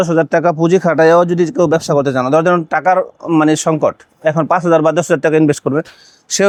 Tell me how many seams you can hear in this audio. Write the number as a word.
zero